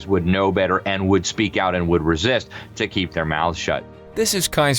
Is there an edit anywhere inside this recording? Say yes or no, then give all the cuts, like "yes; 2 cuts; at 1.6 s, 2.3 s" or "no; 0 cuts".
yes; 1 cut; at 3.9 s